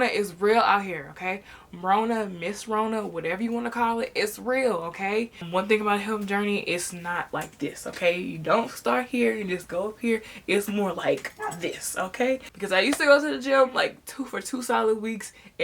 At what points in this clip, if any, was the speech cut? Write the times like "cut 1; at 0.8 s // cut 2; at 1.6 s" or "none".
cut 1; at 5.4 s // cut 2; at 12.5 s

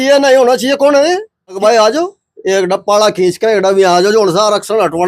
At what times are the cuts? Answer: cut 1; at 1.6 s

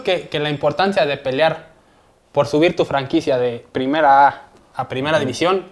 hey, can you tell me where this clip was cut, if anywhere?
none

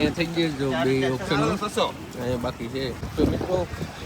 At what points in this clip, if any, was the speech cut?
cut 1; at 3.1 s

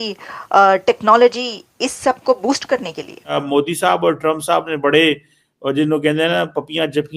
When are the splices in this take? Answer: cut 1; at 3.4 s

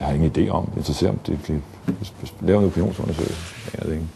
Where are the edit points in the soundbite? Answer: none

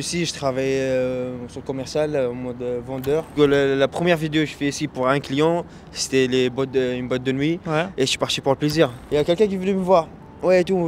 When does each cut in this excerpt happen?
cut 1; at 3.3 s // cut 2; at 9.0 s

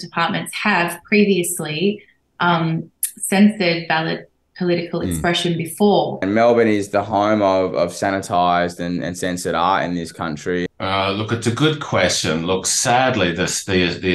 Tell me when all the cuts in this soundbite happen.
cut 1; at 6.2 s // cut 2; at 10.7 s

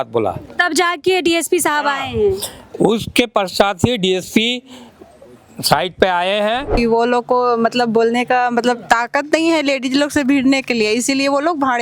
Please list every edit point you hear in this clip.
cut 1; at 6.7 s

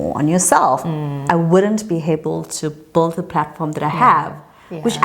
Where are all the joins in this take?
cut 1; at 1.2 s

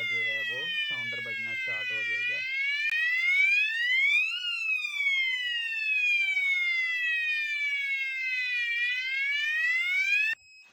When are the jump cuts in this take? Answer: none

